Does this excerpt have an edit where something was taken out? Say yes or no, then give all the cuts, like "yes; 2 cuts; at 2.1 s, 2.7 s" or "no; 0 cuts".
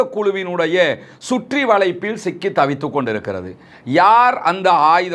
no; 0 cuts